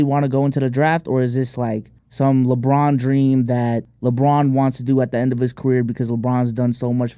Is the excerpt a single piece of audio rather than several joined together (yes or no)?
yes